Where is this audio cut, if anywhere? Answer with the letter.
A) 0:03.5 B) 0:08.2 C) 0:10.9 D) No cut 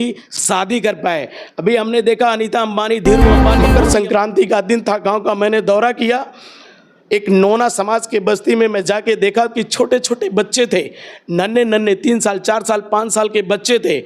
A